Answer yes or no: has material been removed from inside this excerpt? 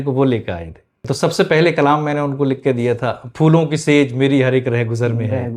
yes